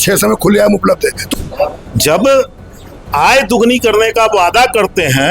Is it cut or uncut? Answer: cut